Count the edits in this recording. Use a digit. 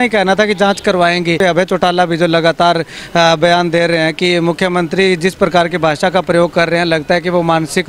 1